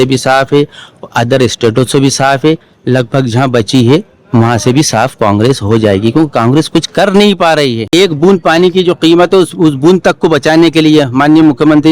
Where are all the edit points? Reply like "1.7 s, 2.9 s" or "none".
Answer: 7.8 s